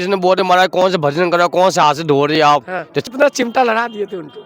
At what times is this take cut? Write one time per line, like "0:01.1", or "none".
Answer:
0:03.0